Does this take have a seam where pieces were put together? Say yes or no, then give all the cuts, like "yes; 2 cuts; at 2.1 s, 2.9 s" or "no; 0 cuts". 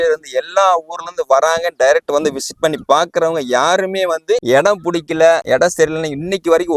no; 0 cuts